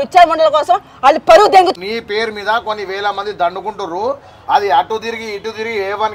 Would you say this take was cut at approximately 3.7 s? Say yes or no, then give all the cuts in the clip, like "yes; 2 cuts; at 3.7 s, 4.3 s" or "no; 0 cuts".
no; 1 cut; at 1.7 s